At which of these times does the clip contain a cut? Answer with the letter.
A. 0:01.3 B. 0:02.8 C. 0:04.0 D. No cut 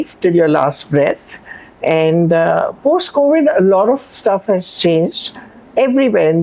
D